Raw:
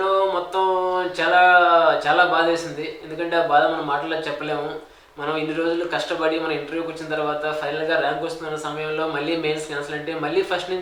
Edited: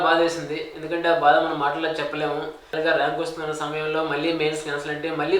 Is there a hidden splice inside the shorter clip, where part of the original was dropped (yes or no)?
yes